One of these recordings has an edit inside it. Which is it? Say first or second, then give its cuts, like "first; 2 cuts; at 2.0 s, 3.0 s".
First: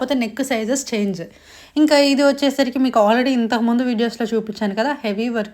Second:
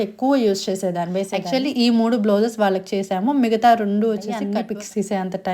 second; 2 cuts; at 1.4 s, 4.4 s